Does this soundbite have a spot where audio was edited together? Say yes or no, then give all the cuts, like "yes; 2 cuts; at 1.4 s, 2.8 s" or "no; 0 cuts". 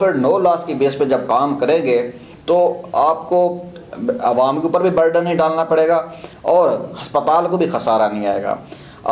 no; 0 cuts